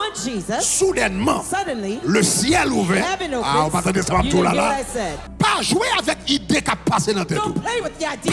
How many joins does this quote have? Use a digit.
1